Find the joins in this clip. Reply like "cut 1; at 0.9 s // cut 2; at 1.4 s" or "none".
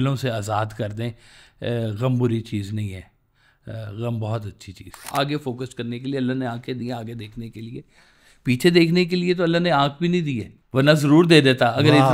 cut 1; at 5.1 s // cut 2; at 10.5 s